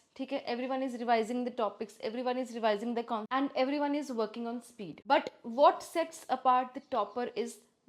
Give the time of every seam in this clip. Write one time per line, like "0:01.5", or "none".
none